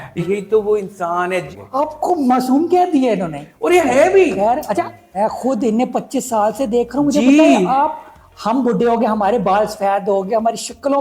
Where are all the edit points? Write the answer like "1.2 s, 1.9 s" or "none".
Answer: 1.6 s, 5.0 s